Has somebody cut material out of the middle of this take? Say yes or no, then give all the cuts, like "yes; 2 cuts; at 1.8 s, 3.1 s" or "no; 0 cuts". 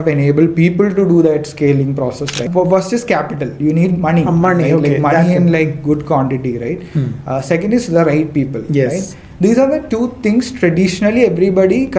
yes; 1 cut; at 2.4 s